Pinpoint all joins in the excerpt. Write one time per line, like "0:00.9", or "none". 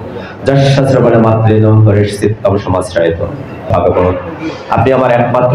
0:03.7

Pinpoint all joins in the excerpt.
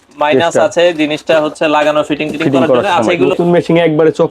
0:03.2

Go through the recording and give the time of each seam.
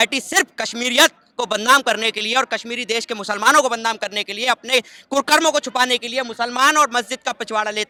none

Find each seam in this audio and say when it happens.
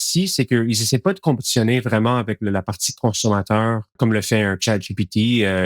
0:04.0

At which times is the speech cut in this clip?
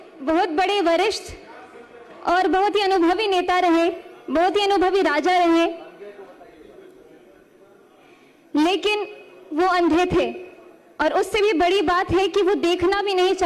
none

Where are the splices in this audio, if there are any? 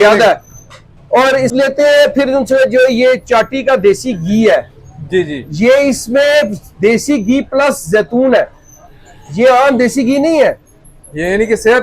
0:01.5

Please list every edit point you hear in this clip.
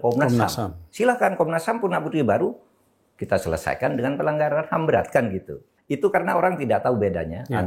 0:05.7

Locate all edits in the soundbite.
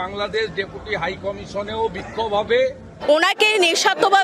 0:02.9

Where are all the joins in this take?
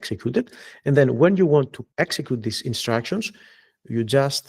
0:01.8

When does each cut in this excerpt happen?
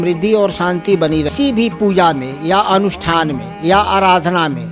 0:01.3

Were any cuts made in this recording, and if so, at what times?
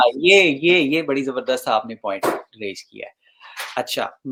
none

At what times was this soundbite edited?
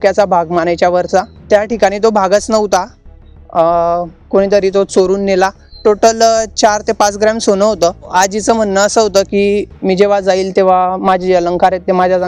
0:01.3
0:05.7
0:08.1

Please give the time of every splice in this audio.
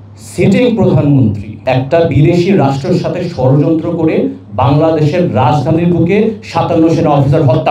none

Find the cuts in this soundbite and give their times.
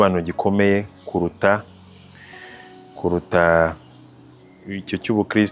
none

